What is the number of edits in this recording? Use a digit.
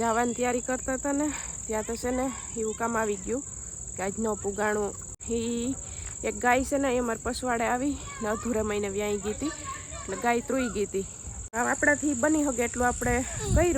2